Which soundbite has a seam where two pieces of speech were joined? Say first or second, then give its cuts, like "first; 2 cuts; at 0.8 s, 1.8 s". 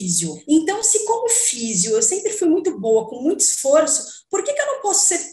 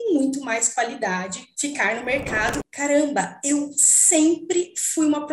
second; 1 cut; at 2.6 s